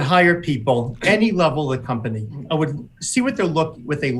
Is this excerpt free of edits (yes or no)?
no